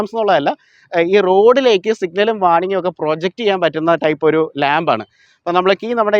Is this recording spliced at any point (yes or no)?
yes